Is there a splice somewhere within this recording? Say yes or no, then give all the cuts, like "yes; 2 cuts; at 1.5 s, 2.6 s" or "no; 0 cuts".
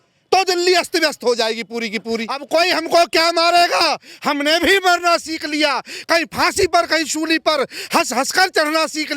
yes; 1 cut; at 2.3 s